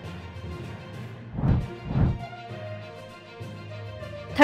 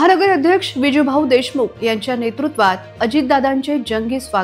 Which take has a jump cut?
first; 1 cut; at 1.2 s

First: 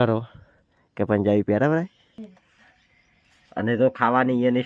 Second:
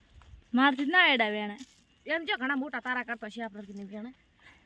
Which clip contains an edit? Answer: first; 1 cut; at 2.2 s

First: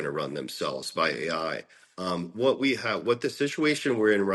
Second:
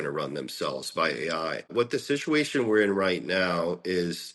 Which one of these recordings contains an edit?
second; 1 cut; at 1.7 s

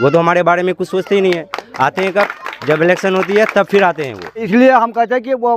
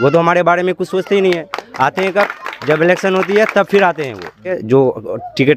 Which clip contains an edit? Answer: first; 1 cut; at 4.4 s

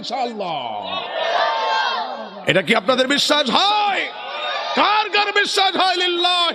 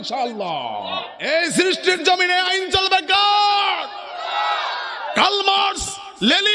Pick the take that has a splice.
second; 1 cut; at 1.3 s

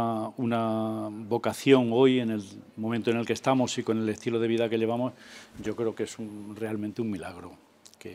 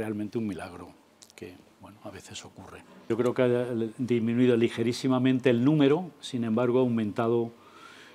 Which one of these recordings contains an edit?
second; 1 cut; at 3.1 s

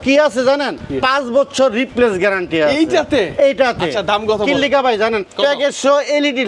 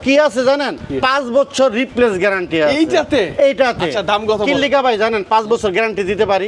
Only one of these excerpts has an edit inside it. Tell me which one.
first; 1 cut; at 5.2 s

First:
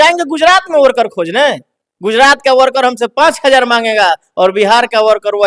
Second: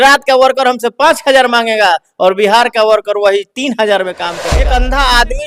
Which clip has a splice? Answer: second; 1 cut; at 4.5 s

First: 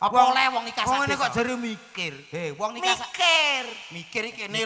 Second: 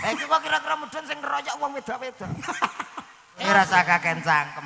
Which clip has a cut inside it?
second; 1 cut; at 3.4 s

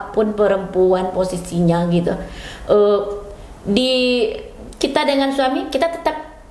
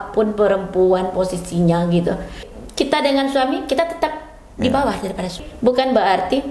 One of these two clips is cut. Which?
second; 2 cuts; at 2.5 s, 5.3 s

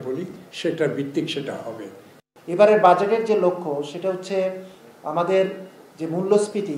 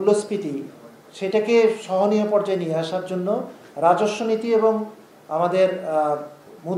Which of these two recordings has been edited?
first; 1 cut; at 2.2 s

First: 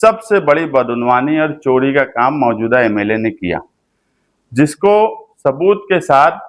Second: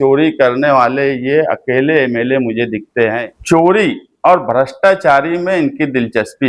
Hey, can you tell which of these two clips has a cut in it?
second; 1 cut; at 3.2 s

